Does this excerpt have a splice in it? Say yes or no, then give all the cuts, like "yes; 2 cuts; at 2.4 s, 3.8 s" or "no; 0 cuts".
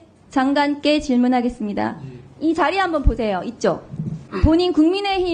yes; 1 cut; at 4.3 s